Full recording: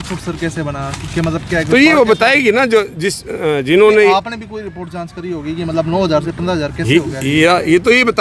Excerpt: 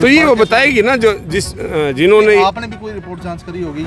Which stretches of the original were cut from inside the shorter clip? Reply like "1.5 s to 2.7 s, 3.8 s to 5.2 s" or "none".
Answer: none